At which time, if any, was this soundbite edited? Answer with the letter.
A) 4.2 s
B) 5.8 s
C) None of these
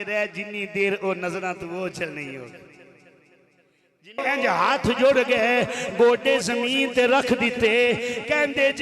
A